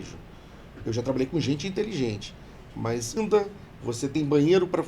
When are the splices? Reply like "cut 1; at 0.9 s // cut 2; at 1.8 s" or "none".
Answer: cut 1; at 3.2 s